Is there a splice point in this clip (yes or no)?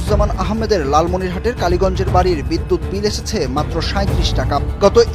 no